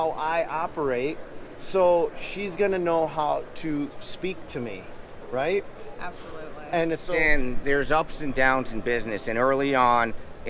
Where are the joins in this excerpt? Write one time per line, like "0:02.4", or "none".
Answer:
0:07.0